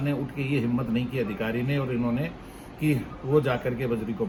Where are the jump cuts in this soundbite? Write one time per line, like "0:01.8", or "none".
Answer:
none